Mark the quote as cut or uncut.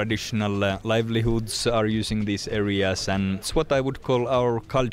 cut